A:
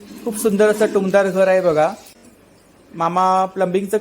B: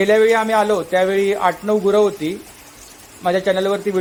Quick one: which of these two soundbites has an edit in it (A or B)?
A